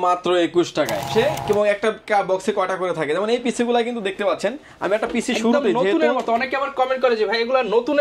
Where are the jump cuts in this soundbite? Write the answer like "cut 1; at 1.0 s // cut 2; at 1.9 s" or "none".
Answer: cut 1; at 1.1 s